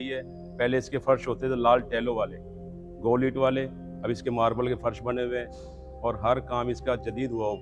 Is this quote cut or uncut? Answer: uncut